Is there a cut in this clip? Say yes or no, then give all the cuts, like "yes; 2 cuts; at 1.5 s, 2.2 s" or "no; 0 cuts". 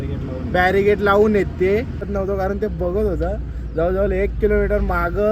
yes; 1 cut; at 2.0 s